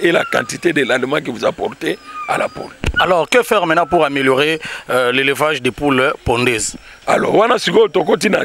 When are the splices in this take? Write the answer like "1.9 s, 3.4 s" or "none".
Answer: none